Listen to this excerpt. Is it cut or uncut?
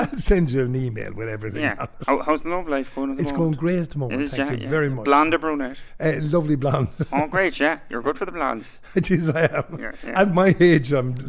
uncut